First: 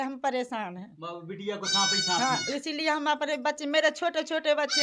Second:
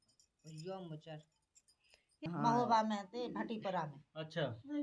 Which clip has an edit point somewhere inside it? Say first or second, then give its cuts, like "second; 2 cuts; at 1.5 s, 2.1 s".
second; 1 cut; at 2.2 s